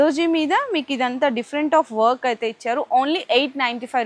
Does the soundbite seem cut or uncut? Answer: uncut